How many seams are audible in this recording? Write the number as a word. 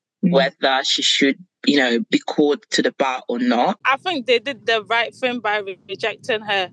one